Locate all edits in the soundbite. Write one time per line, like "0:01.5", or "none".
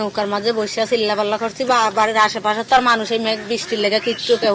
none